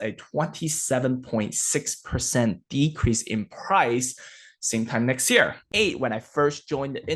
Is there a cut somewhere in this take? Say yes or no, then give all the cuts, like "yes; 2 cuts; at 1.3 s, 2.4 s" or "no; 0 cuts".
yes; 1 cut; at 5.6 s